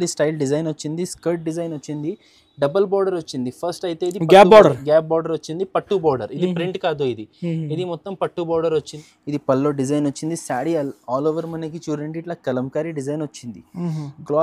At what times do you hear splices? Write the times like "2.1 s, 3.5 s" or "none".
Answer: 8.9 s